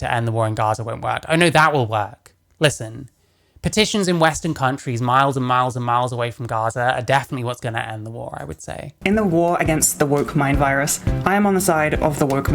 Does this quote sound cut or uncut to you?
cut